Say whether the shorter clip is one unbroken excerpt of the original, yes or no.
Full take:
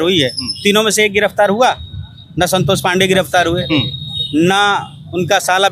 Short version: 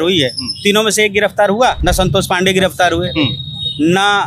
no